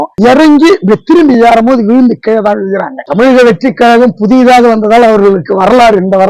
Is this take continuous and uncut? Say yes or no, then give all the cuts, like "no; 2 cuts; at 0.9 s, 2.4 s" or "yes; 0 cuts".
no; 1 cut; at 3.0 s